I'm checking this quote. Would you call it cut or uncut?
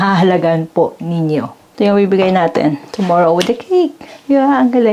cut